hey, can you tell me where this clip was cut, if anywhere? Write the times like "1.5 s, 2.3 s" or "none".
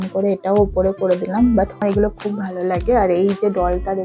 1.8 s